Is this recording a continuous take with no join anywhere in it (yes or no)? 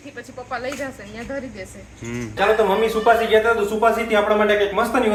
yes